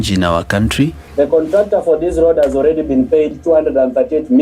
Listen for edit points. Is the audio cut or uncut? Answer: cut